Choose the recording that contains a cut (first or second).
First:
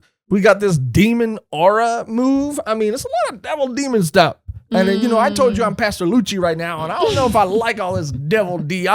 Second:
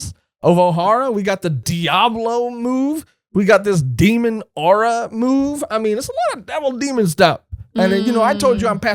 second